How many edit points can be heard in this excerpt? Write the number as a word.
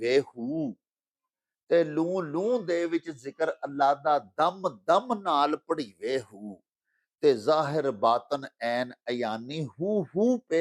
zero